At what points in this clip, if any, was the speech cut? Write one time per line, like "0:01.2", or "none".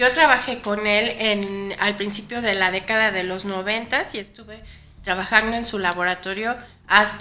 none